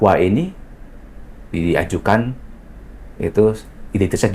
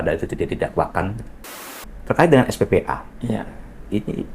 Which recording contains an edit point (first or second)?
second